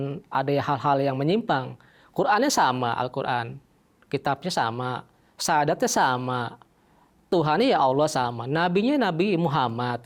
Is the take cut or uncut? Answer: uncut